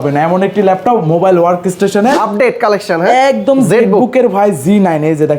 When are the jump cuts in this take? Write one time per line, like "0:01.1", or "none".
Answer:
0:02.2